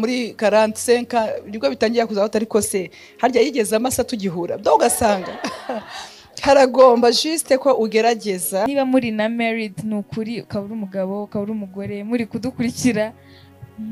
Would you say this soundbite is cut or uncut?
cut